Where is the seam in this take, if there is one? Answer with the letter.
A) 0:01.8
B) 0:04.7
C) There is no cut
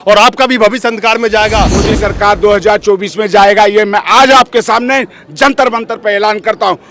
A